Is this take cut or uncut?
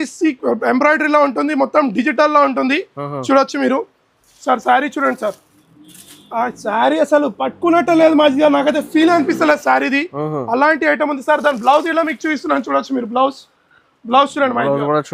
uncut